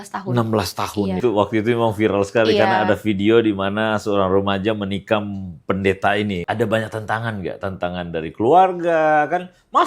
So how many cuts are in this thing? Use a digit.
2